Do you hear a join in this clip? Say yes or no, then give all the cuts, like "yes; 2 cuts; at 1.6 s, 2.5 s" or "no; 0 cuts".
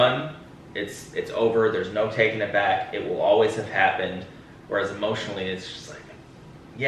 no; 0 cuts